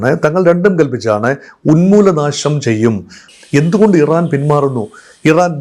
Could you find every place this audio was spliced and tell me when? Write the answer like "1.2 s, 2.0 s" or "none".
3.3 s